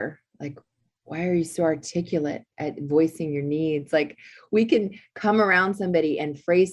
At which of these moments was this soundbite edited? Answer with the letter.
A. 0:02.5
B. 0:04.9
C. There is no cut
A